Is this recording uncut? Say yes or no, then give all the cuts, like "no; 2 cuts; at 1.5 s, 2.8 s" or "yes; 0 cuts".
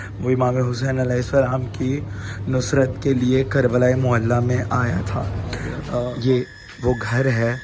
no; 1 cut; at 5.8 s